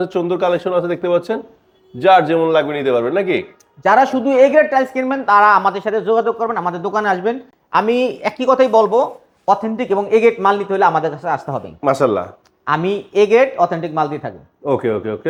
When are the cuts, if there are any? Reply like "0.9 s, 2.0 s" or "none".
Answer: none